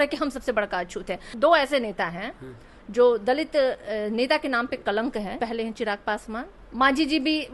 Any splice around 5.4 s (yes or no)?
yes